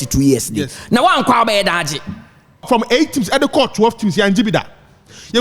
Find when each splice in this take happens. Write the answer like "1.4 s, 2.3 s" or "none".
2.6 s